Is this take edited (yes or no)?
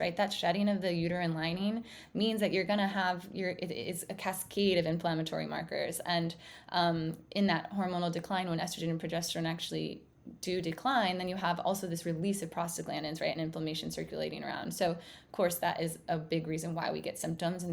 no